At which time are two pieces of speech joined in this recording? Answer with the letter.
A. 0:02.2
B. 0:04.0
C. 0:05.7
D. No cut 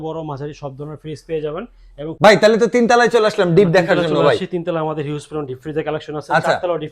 A